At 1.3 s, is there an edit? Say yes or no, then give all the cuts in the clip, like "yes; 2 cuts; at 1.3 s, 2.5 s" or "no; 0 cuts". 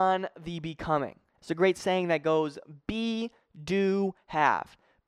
yes; 1 cut; at 1.3 s